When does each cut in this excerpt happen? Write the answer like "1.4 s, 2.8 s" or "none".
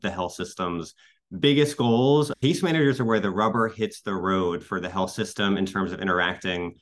2.3 s